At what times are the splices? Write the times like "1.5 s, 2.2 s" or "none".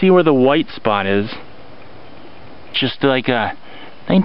2.7 s